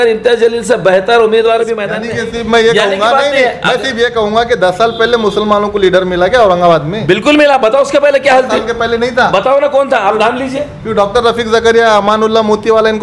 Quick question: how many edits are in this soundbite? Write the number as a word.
one